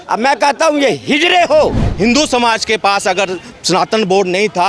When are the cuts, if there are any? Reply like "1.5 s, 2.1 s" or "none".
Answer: 1.8 s